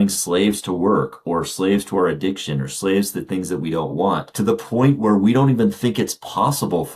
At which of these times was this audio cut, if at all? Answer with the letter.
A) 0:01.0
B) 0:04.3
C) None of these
B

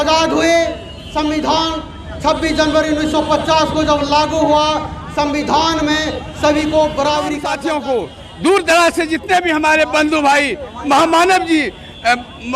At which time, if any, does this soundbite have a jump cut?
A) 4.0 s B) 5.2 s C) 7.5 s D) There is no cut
C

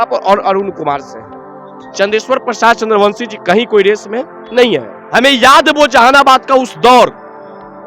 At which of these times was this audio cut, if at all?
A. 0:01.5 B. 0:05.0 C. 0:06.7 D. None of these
B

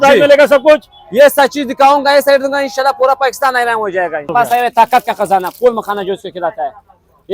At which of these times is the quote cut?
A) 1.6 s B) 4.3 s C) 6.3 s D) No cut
B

